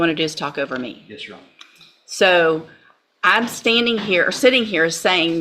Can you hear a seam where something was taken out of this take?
no; 0 cuts

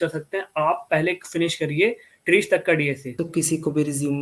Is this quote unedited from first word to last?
no; 1 cut; at 3.1 s

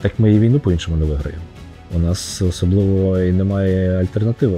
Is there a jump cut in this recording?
no; 0 cuts

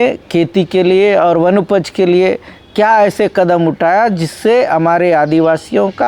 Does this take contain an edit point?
no; 0 cuts

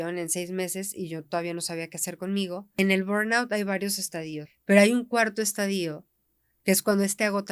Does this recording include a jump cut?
yes; 2 cuts; at 2.8 s, 4.4 s

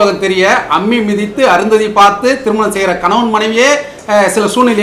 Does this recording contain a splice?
no; 0 cuts

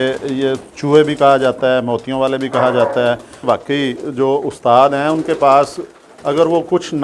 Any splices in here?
yes; 1 cut; at 3.4 s

